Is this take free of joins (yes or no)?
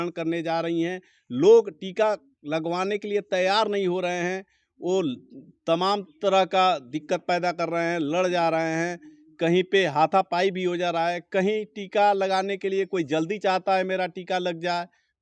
yes